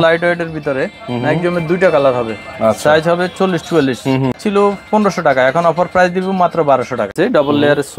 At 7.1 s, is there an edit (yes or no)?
yes